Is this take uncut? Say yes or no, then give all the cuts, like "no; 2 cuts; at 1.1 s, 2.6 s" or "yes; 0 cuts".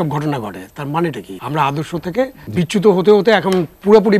no; 2 cuts; at 1.3 s, 2.4 s